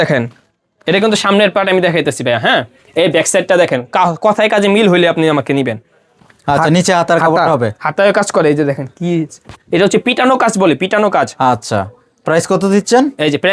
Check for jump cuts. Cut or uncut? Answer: uncut